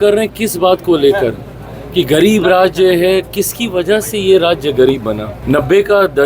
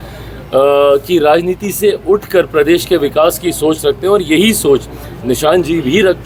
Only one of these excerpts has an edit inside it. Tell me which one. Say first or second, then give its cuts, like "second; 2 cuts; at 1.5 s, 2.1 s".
first; 1 cut; at 5.3 s